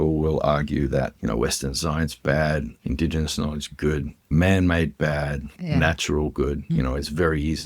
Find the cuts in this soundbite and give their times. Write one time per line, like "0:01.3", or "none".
0:01.1
0:02.7
0:04.3
0:05.6
0:06.6